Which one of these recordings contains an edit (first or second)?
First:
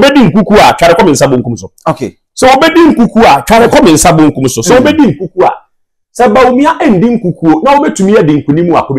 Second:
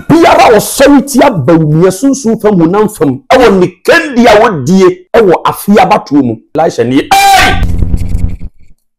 second